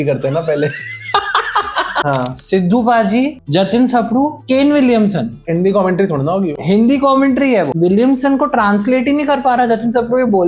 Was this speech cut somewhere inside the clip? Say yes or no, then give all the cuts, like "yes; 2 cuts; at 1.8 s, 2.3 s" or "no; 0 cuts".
yes; 4 cuts; at 2.0 s, 4.4 s, 5.4 s, 7.7 s